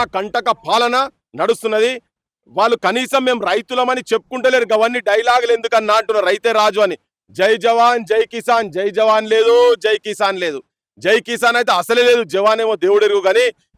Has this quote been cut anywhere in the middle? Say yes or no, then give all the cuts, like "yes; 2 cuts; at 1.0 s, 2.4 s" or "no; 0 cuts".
no; 0 cuts